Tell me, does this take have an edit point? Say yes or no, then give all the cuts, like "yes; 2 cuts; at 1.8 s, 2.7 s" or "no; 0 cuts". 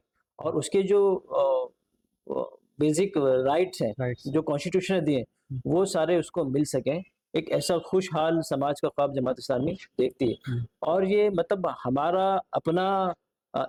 no; 0 cuts